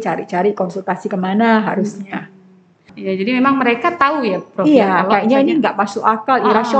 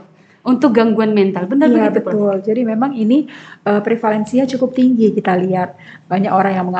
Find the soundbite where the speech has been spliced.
first; 1 cut; at 2.9 s

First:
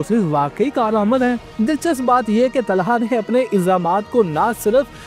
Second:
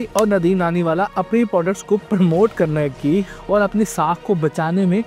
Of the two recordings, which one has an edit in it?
first; 1 cut; at 1.5 s

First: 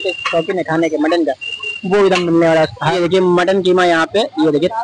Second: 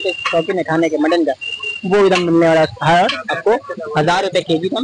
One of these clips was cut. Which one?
first; 1 cut; at 2.8 s

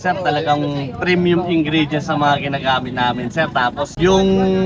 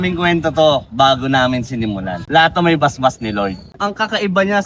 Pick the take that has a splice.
second; 1 cut; at 3.7 s

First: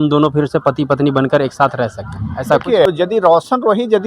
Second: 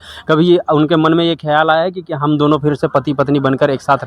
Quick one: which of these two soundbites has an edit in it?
first; 1 cut; at 2.9 s

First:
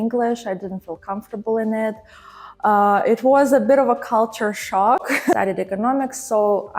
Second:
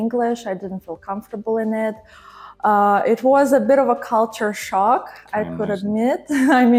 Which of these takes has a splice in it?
first; 1 cut; at 5.2 s

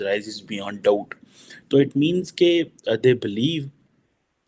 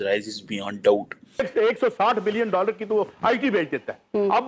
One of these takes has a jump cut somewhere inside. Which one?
second; 1 cut; at 1.5 s

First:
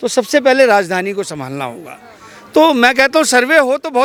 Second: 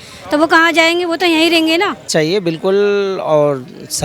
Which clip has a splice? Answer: second; 1 cut; at 2.1 s

